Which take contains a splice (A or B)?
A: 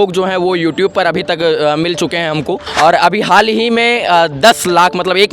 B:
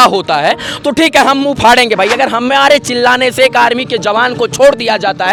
A